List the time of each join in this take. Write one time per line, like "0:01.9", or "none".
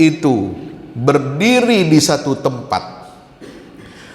none